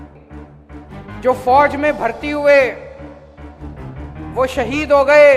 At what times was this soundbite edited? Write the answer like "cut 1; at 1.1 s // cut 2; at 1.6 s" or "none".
cut 1; at 1.2 s